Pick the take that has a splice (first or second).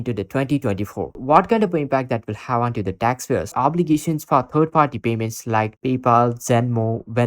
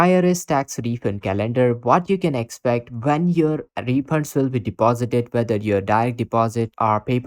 first